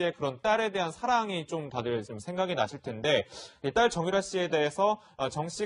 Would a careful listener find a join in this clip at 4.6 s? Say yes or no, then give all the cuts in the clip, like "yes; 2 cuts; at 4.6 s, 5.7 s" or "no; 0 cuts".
no; 1 cut; at 2.7 s